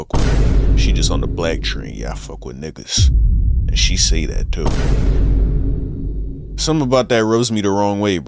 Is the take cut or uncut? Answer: uncut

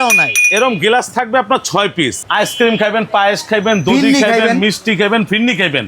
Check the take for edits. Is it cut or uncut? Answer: cut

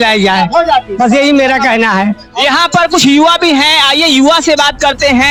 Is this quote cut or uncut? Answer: uncut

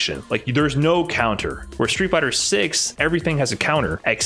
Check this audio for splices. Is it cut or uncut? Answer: cut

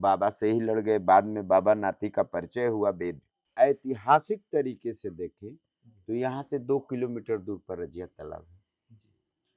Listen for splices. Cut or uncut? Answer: cut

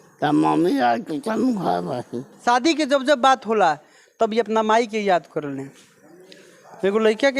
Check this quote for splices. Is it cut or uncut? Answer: cut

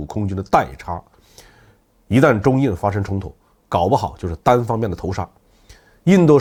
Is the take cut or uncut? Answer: uncut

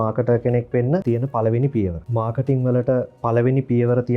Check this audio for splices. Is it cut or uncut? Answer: cut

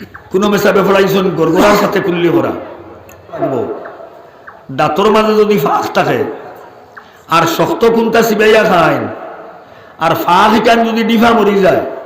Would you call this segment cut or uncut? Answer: cut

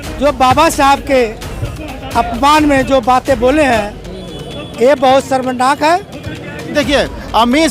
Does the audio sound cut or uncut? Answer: cut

